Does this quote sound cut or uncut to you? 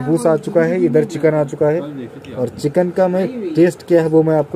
uncut